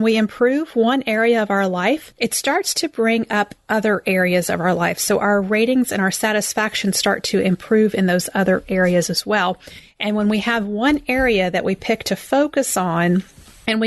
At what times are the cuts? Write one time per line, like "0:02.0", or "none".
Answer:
0:02.1